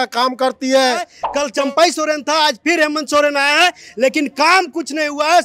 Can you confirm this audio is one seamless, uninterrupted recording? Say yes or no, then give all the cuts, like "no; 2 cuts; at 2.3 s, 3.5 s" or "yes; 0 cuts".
no; 1 cut; at 1.2 s